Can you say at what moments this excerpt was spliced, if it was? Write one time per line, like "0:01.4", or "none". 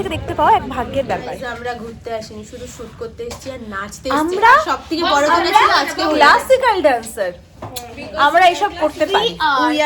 0:01.3